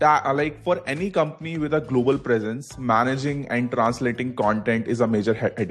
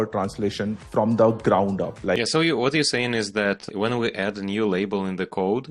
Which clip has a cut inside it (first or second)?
second